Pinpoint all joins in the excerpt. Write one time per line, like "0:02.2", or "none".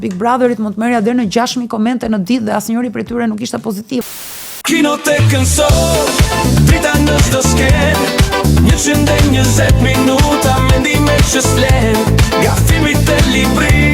0:04.5